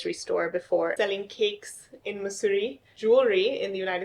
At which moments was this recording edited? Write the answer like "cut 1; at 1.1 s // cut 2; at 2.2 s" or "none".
cut 1; at 0.9 s // cut 2; at 2.9 s